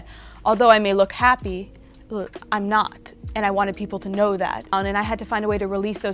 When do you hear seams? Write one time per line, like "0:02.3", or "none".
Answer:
0:04.7

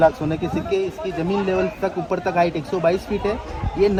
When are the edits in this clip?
none

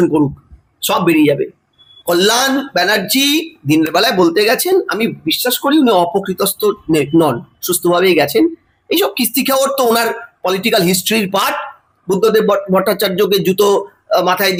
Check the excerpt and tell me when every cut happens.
none

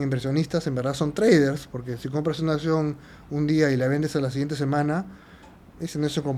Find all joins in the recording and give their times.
none

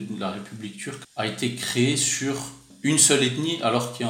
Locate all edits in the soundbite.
0:01.0
0:02.7

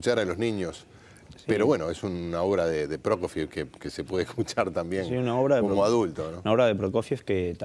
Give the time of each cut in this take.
0:04.8

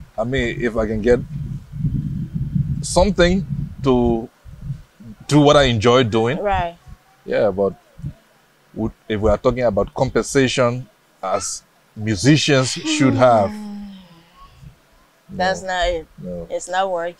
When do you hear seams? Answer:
none

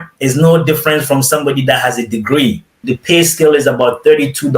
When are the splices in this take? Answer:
0:02.9

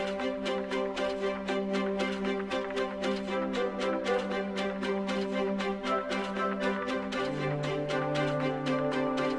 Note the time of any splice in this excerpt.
none

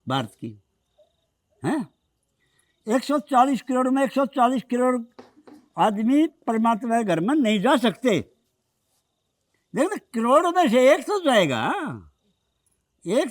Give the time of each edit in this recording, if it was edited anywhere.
none

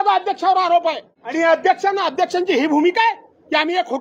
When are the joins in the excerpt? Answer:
0:01.2

